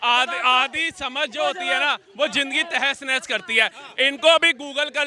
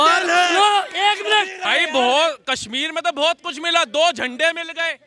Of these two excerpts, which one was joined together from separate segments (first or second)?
second